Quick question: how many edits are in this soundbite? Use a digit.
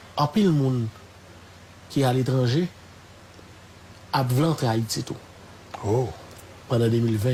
0